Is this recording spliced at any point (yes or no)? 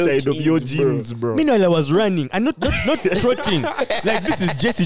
no